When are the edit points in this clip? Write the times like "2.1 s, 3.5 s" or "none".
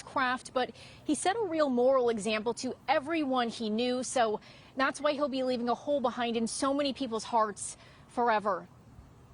3.5 s